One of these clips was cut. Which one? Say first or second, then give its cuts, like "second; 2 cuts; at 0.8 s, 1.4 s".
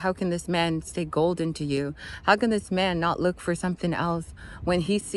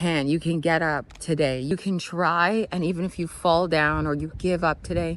second; 1 cut; at 1.7 s